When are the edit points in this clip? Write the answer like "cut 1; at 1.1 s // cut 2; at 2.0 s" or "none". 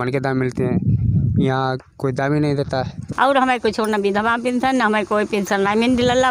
cut 1; at 3.0 s